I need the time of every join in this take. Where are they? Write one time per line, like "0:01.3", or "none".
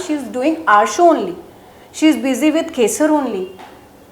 none